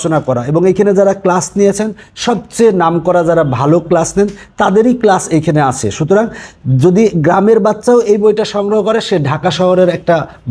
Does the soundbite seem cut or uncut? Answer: uncut